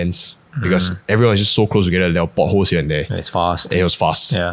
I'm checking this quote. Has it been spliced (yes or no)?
no